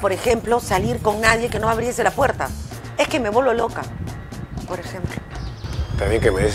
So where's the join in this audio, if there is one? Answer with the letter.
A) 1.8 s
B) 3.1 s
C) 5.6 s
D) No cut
D